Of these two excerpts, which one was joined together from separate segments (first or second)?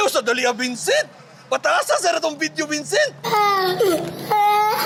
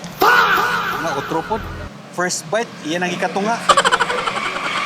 second